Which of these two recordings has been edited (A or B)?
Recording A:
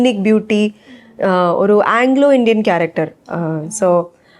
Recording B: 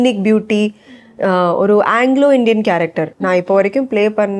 B